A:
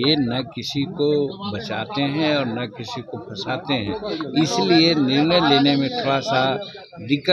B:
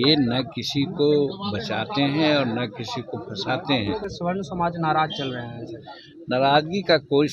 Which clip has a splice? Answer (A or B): B